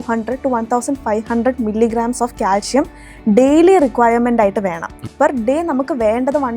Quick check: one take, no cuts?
no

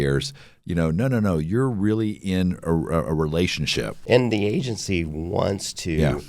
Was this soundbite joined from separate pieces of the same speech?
yes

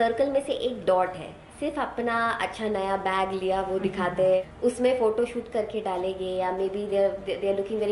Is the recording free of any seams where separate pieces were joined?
no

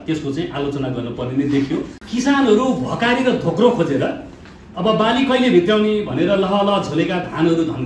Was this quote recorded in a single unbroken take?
no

